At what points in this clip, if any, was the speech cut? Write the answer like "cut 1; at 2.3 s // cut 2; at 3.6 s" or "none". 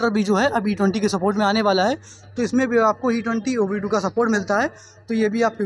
none